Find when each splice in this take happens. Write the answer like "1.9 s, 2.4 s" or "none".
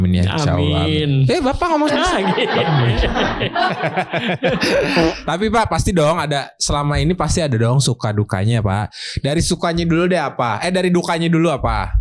none